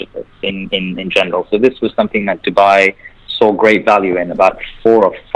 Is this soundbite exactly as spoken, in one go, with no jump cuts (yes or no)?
yes